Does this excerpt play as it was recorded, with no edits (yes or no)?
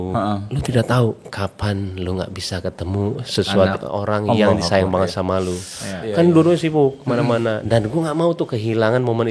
yes